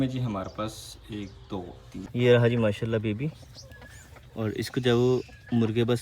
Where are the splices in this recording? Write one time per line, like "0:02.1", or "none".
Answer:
0:02.1